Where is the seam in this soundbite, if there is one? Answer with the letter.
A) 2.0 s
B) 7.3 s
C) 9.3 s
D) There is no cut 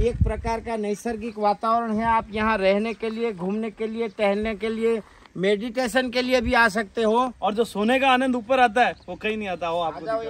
B